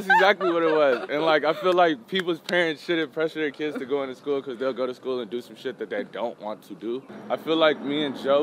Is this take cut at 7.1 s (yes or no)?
yes